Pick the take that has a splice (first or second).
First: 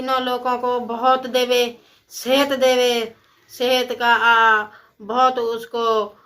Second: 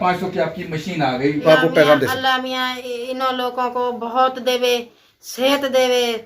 second